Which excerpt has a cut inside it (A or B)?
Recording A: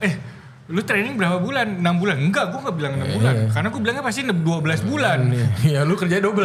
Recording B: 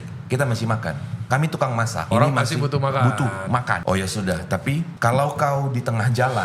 B